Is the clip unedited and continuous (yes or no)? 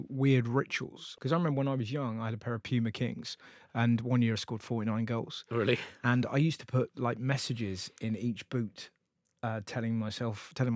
no